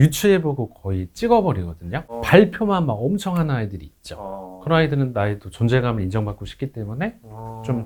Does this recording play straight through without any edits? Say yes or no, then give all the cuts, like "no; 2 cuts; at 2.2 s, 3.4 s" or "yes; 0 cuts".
yes; 0 cuts